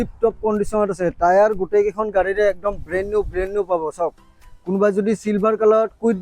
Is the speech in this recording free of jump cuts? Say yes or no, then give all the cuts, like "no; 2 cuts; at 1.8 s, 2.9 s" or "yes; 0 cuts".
yes; 0 cuts